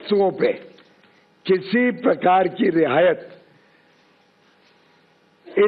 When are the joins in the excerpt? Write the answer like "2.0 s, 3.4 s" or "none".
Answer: none